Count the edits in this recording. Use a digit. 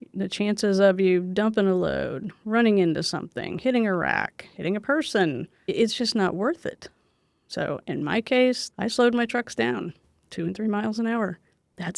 2